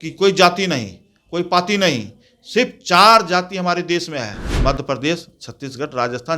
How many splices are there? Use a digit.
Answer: 1